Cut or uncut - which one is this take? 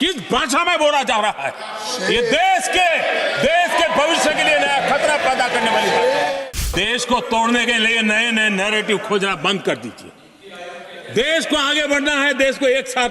cut